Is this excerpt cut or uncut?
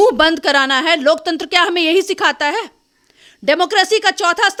uncut